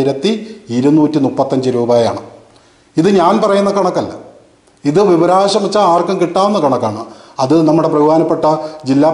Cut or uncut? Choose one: uncut